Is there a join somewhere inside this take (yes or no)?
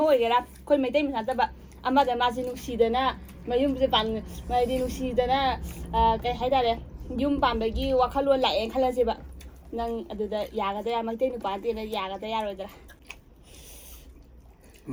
no